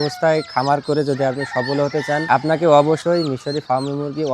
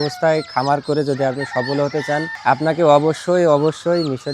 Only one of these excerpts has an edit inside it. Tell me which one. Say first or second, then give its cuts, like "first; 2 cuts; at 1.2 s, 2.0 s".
first; 2 cuts; at 2.2 s, 3.0 s